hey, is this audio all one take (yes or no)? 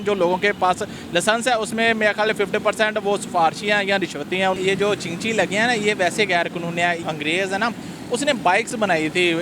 no